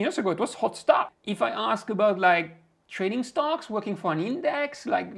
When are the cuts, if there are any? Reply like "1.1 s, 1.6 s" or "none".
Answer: 1.2 s